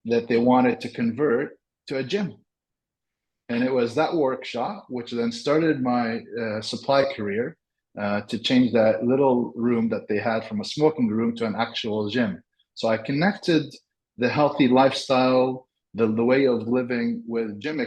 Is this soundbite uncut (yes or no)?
yes